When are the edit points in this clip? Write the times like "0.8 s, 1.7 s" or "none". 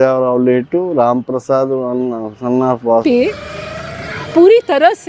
3.0 s